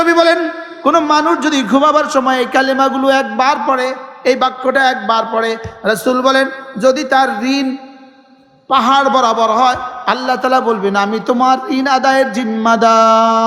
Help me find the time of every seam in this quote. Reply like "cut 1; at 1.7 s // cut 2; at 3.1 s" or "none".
none